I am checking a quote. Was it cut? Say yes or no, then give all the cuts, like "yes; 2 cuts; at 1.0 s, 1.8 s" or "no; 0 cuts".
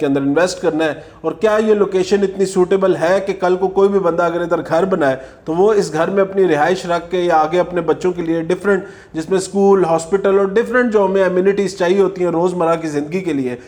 no; 0 cuts